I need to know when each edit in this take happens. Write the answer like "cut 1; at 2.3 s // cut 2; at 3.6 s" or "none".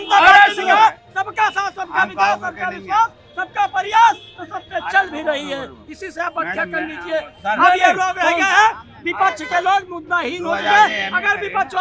none